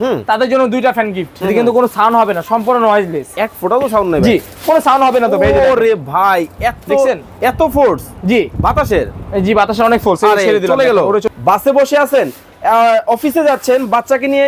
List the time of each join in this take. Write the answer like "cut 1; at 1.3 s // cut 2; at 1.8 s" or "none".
cut 1; at 1.3 s // cut 2; at 11.3 s